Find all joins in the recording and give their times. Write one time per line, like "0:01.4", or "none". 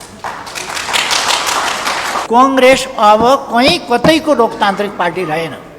0:02.2